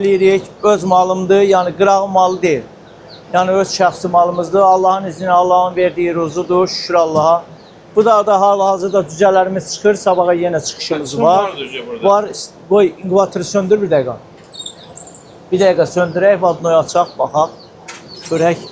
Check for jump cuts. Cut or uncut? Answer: uncut